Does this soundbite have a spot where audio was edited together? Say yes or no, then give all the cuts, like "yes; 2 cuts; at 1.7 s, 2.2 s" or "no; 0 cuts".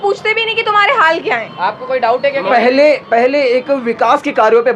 no; 0 cuts